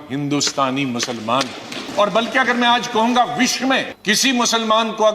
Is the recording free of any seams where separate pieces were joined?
no; 2 cuts; at 1.8 s, 3.9 s

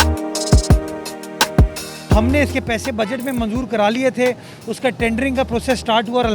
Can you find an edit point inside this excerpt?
yes; 1 cut; at 2.1 s

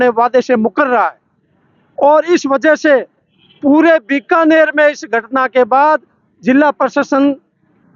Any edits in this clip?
no; 0 cuts

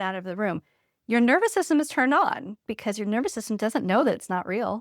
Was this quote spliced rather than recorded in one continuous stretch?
yes; 1 cut; at 2.6 s

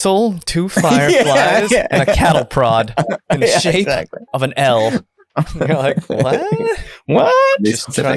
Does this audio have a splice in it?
no; 0 cuts

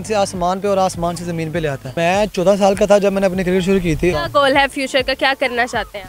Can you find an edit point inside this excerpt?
yes; 2 cuts; at 1.9 s, 4.1 s

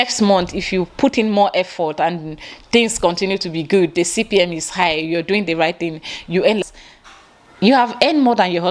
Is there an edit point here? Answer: yes; 1 cut; at 6.6 s

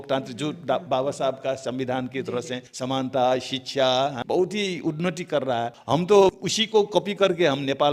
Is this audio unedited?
no; 4 cuts; at 2.6 s, 4.2 s, 5.8 s, 6.5 s

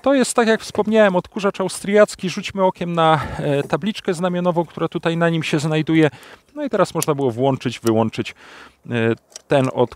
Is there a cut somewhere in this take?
yes; 1 cut; at 6.5 s

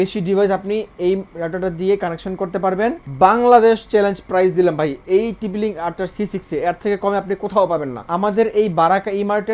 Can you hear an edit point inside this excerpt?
yes; 2 cuts; at 3.0 s, 8.0 s

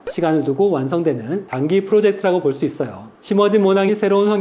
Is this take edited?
no; 0 cuts

